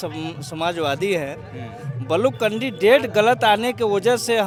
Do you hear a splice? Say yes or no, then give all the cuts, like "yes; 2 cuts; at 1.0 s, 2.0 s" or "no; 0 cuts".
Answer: no; 0 cuts